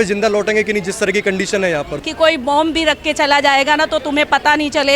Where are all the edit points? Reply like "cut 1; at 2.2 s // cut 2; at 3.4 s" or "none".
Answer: cut 1; at 2.0 s